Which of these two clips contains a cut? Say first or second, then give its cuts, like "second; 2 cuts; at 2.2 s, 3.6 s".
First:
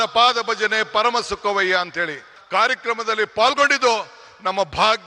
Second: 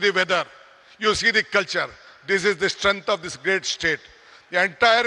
first; 1 cut; at 2.3 s